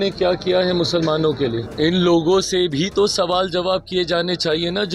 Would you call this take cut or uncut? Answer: cut